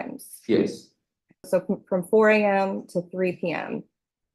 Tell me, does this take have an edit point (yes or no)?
yes